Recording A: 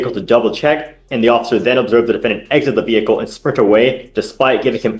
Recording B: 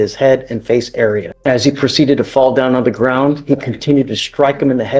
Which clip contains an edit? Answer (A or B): B